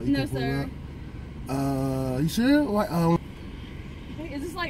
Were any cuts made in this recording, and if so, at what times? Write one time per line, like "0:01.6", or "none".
0:03.2